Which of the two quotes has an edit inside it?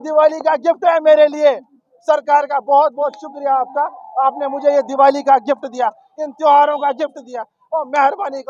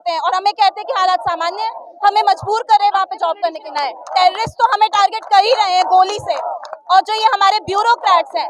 second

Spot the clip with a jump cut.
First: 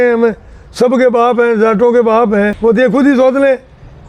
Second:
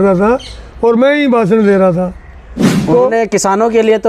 first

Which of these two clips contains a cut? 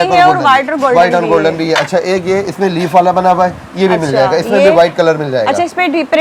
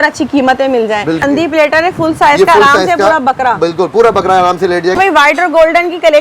second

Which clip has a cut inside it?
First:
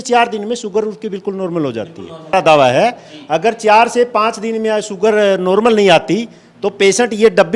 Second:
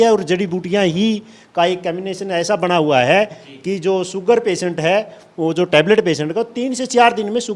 first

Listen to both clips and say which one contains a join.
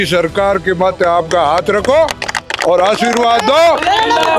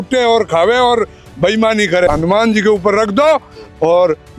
second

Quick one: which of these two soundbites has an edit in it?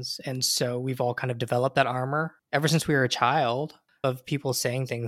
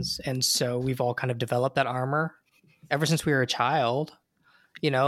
first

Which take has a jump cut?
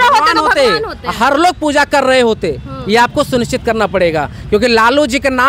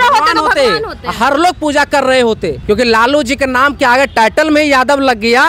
second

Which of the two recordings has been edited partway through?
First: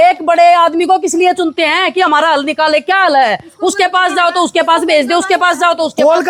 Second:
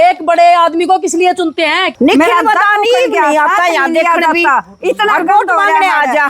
second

